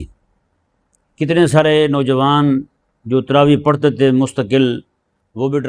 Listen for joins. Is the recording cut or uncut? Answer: uncut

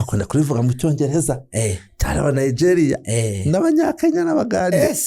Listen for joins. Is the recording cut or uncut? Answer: uncut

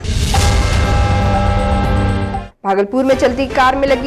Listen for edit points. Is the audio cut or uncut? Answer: cut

